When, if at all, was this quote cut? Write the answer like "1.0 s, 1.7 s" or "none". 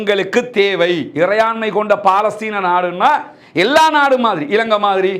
none